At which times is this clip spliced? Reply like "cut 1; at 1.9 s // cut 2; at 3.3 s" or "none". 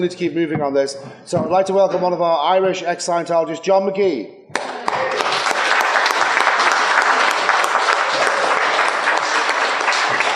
none